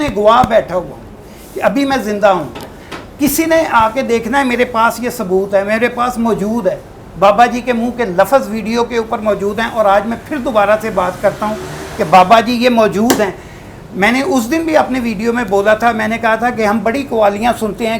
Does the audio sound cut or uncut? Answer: uncut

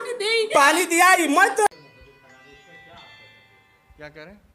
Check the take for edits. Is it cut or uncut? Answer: cut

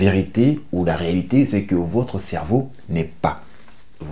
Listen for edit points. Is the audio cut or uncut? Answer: uncut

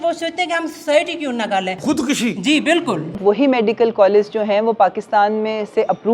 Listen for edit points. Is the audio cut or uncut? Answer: cut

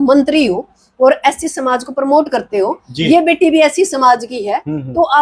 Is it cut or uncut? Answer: uncut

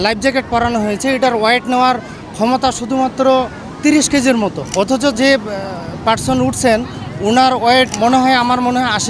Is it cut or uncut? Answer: cut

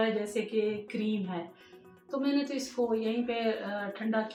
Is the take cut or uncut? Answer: uncut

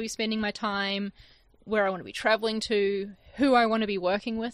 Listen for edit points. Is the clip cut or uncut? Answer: uncut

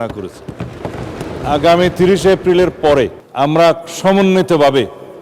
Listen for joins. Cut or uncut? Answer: cut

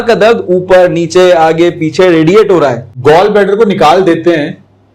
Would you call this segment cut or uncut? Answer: cut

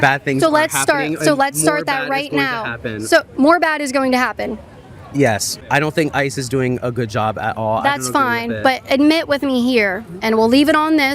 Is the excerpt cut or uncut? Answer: cut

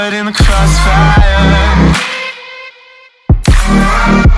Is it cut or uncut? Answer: uncut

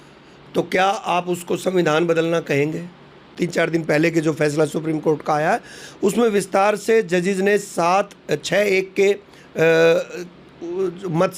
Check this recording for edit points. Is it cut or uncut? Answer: cut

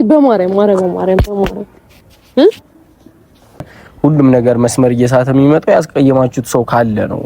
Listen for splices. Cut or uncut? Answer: cut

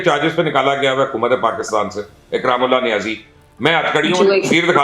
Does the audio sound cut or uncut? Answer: uncut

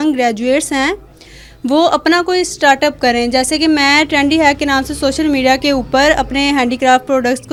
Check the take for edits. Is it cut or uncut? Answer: uncut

